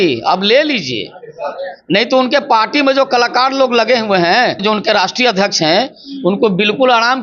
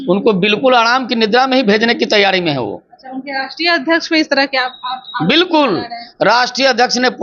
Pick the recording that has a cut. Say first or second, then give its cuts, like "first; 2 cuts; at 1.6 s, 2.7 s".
first; 1 cut; at 4.6 s